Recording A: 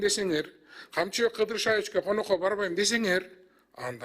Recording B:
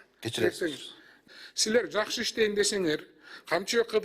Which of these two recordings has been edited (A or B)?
B